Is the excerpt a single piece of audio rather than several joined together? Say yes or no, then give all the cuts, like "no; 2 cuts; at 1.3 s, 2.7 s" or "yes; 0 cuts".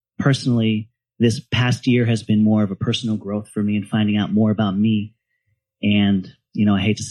yes; 0 cuts